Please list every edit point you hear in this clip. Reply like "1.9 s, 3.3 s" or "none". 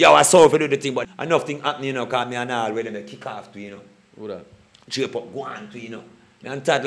1.0 s

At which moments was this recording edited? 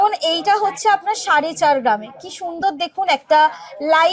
none

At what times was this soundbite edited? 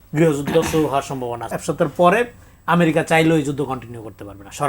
1.4 s

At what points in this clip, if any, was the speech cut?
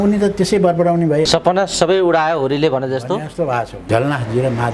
1.3 s, 3.8 s

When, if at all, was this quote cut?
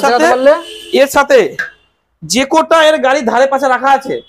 none

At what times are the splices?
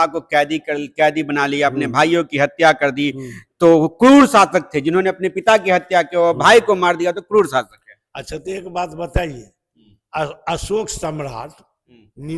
none

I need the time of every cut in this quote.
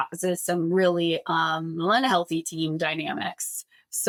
none

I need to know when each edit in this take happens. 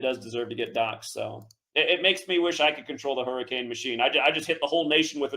1.6 s

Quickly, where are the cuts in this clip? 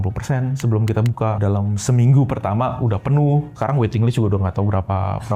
1.4 s, 3.5 s

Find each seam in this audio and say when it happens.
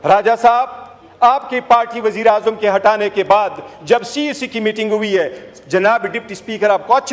none

